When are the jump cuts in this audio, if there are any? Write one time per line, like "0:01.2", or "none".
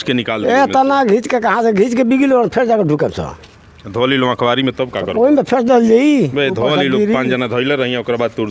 none